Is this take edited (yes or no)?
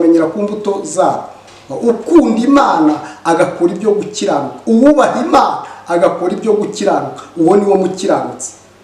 no